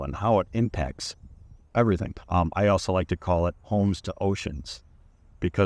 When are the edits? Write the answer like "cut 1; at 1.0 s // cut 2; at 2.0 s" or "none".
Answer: cut 1; at 2.1 s